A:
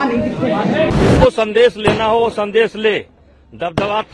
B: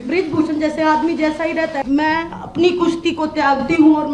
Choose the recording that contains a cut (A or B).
A